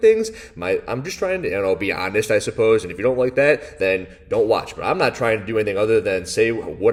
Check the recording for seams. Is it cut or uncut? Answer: uncut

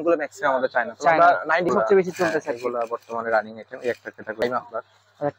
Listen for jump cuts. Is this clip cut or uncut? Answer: cut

